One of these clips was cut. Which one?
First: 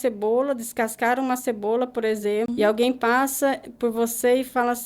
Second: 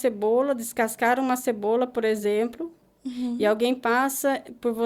first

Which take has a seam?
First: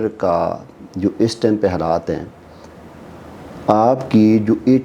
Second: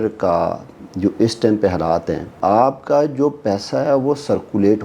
second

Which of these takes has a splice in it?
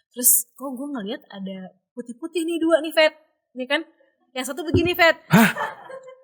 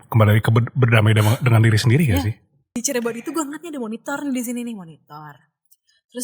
second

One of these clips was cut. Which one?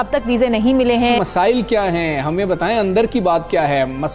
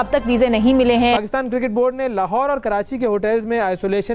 first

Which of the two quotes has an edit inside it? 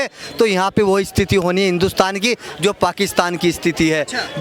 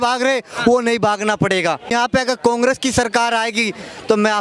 second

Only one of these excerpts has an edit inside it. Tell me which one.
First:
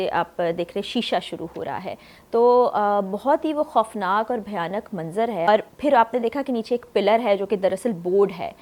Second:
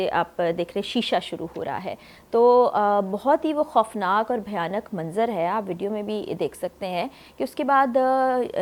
first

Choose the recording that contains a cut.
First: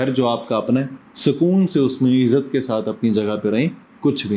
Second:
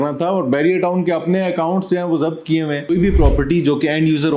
second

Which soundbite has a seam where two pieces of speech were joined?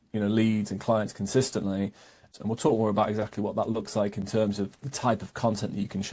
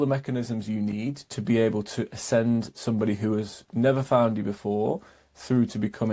first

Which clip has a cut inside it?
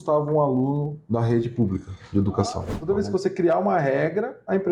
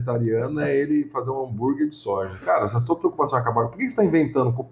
first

